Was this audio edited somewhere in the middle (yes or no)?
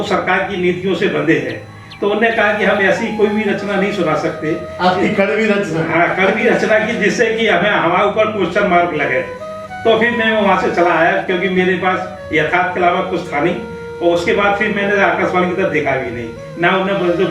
no